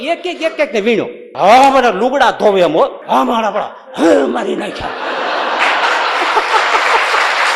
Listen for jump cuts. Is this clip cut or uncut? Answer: cut